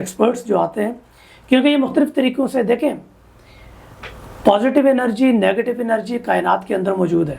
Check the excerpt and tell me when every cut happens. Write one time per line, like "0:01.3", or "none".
none

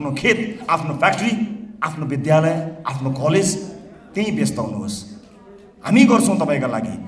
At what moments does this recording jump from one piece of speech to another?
none

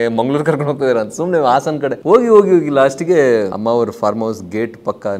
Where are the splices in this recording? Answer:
0:02.0
0:03.5

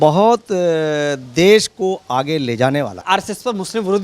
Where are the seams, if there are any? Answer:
0:03.0

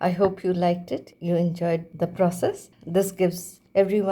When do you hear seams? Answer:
0:01.1
0:01.9
0:03.2

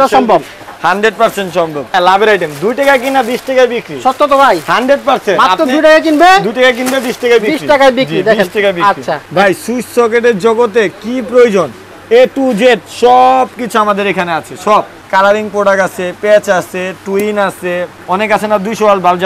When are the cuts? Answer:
0:01.9
0:09.2
0:15.0
0:17.9

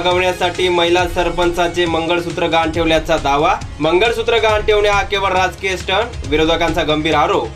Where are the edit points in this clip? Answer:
none

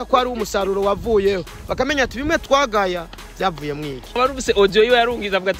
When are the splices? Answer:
0:04.1

